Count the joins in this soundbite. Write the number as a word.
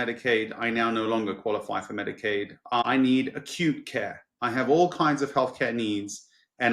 one